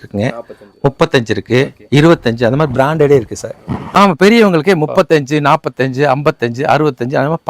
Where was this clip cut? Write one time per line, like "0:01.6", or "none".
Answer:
0:03.8